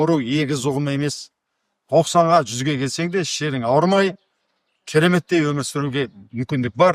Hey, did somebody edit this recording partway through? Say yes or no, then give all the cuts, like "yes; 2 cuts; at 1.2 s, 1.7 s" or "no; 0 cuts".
no; 0 cuts